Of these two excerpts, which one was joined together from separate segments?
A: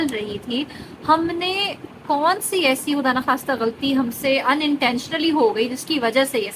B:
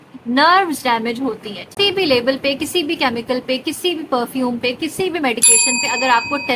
B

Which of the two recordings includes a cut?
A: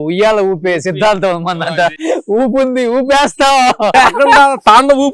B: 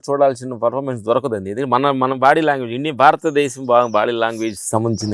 A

